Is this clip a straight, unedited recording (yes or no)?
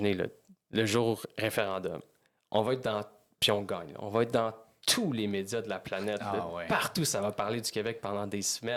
yes